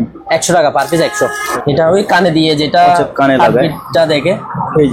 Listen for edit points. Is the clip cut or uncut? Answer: cut